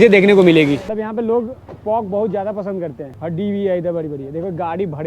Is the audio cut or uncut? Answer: cut